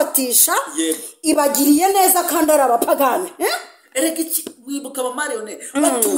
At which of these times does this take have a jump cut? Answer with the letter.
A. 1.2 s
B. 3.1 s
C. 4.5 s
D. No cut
D